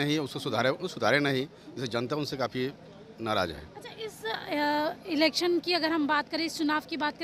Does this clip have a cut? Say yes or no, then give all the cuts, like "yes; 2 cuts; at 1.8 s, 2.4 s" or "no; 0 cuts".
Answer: no; 0 cuts